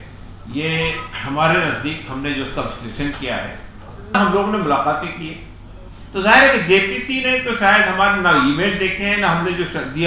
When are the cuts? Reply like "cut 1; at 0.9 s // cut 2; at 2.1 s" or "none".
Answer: cut 1; at 4.1 s